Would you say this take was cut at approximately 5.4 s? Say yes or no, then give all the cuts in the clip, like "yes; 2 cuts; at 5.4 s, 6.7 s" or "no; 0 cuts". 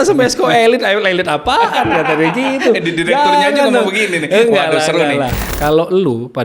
yes; 1 cut; at 5.4 s